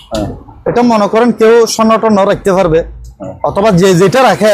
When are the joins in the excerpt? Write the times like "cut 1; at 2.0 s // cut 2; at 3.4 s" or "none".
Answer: none